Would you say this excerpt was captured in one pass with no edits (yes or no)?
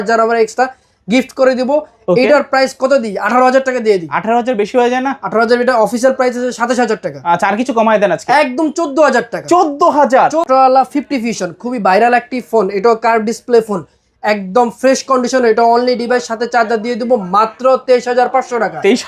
no